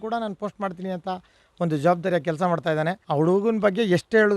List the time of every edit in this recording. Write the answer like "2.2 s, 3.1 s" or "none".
3.0 s